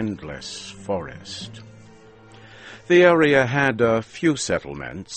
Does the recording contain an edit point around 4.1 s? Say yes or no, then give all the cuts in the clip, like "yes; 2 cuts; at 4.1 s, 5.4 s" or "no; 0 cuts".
no; 1 cut; at 2.1 s